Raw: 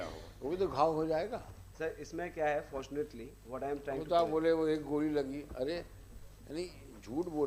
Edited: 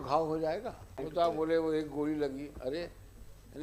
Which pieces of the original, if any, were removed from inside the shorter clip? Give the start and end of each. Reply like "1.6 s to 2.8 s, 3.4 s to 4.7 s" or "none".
1.6 s to 3.9 s